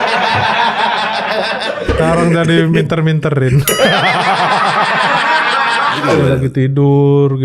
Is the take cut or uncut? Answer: cut